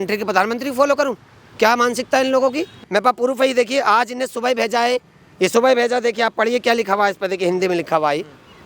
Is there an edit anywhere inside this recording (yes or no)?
yes